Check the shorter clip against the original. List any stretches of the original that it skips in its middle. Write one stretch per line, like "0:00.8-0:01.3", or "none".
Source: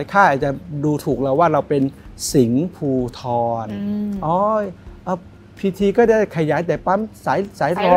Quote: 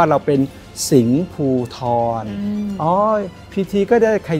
0:04.8-0:05.4